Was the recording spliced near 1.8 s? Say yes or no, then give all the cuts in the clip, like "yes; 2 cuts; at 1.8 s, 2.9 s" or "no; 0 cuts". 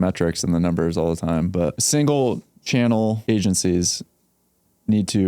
yes; 2 cuts; at 1.8 s, 3.2 s